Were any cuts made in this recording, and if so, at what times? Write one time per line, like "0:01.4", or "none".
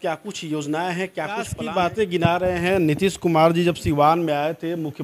0:01.6